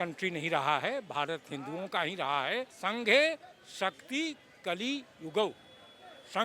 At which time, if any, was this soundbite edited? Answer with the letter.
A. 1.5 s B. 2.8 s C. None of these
B